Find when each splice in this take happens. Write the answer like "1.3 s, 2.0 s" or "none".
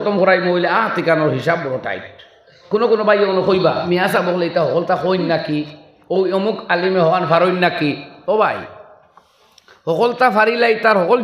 2.5 s, 3.8 s